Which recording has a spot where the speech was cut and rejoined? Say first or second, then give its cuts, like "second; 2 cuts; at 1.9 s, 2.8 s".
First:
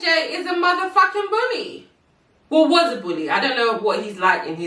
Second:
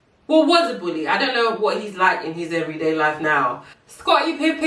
second; 1 cut; at 3.7 s